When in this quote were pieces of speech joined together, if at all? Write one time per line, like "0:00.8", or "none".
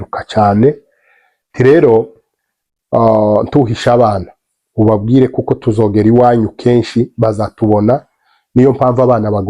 none